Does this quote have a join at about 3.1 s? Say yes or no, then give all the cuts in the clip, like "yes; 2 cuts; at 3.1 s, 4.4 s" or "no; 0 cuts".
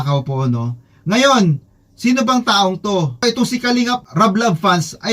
yes; 1 cut; at 3.1 s